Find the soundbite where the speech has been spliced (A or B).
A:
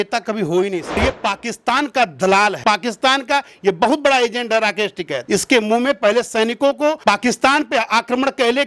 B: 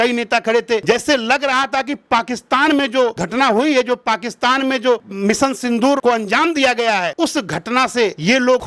A